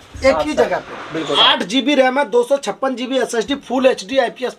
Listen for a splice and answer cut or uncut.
cut